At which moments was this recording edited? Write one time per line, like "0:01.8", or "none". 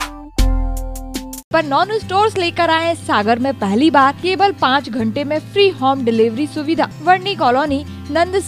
0:01.5
0:04.2
0:07.0